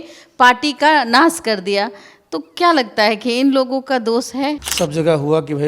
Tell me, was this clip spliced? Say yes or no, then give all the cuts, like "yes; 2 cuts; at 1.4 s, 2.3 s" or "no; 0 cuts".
yes; 1 cut; at 4.7 s